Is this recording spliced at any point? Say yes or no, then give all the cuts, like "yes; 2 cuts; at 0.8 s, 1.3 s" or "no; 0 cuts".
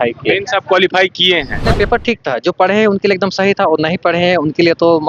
yes; 1 cut; at 1.6 s